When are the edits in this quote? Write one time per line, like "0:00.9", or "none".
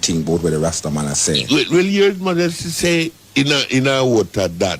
0:03.2